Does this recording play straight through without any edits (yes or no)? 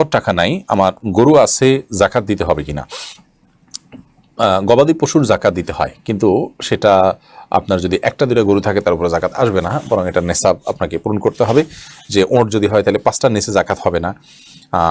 yes